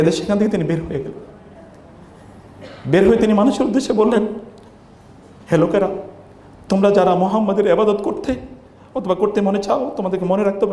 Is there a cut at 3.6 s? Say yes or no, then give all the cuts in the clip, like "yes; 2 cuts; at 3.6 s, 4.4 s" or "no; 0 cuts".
no; 0 cuts